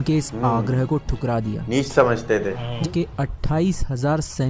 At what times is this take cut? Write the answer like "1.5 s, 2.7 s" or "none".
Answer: 2.8 s